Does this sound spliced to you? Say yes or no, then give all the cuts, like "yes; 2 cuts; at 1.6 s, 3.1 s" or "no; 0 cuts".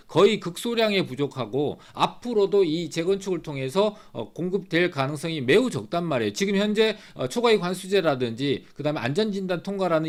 no; 0 cuts